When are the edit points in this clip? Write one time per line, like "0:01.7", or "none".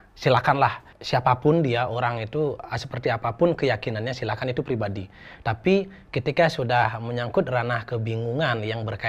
0:00.9